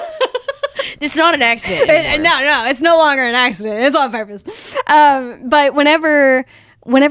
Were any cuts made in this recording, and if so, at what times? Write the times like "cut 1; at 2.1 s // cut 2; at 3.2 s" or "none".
none

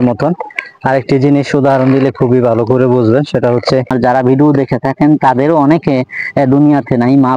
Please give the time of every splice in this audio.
cut 1; at 3.9 s

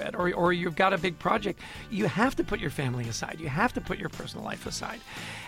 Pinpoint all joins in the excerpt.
cut 1; at 1.8 s

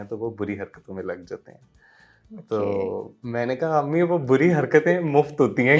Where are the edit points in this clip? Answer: none

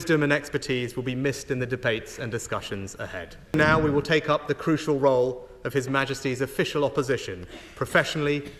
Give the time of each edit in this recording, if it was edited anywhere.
cut 1; at 3.5 s

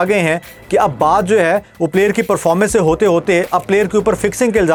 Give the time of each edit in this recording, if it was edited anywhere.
none

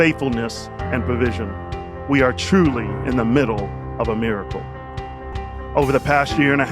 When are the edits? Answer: cut 1; at 5.3 s

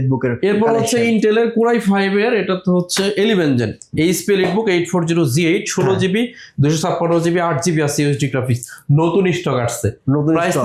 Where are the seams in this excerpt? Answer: none

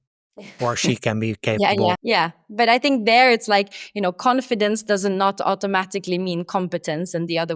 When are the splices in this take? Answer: cut 1; at 1.6 s

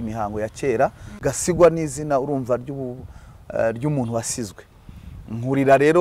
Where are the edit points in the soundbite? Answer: cut 1; at 1.2 s

